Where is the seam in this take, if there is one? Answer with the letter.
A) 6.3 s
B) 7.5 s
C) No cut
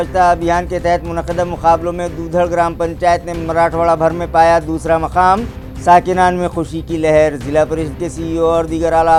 C